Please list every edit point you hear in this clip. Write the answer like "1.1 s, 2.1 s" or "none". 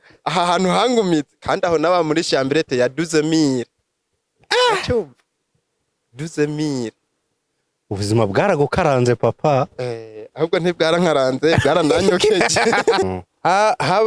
13.1 s